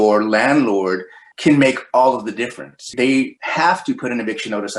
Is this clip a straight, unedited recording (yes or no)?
yes